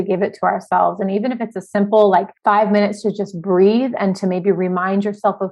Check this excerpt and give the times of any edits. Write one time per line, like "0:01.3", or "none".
0:02.3

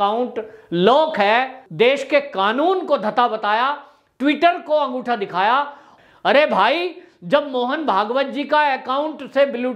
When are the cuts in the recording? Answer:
0:01.6
0:05.8

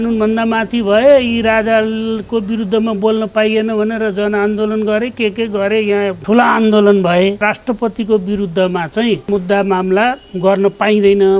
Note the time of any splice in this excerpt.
0:06.2
0:07.4
0:09.3

